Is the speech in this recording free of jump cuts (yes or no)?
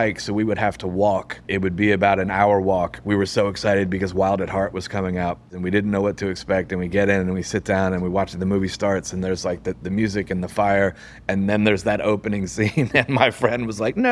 no